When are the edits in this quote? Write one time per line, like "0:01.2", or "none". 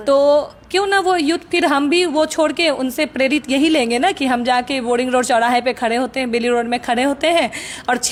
none